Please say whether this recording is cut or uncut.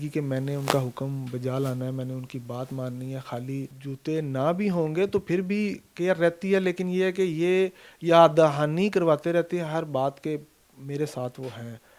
uncut